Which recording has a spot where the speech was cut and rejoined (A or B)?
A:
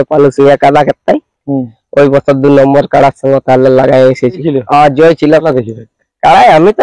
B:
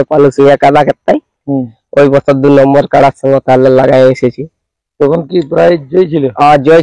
A